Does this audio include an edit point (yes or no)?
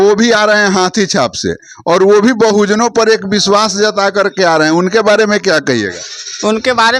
no